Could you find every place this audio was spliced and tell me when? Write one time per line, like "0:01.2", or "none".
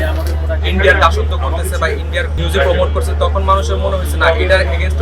0:02.3